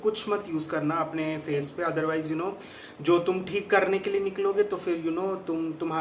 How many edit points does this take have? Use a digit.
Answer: 0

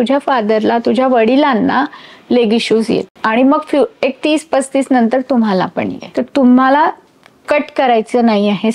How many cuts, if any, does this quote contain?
2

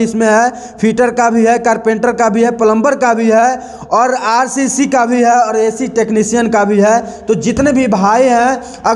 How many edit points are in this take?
0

